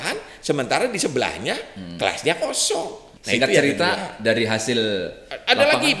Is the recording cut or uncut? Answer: uncut